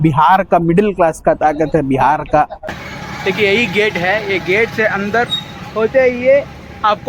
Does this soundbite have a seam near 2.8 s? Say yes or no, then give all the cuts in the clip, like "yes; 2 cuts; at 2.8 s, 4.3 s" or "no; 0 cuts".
yes; 1 cut; at 2.8 s